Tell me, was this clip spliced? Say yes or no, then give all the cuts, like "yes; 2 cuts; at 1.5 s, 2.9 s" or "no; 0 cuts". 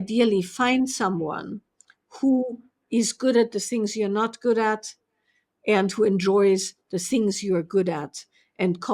no; 0 cuts